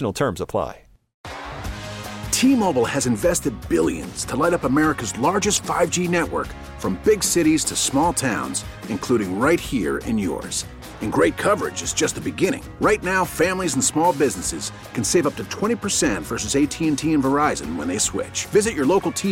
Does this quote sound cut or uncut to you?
cut